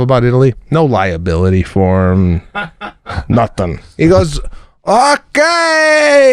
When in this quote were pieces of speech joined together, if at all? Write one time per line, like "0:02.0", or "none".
0:03.9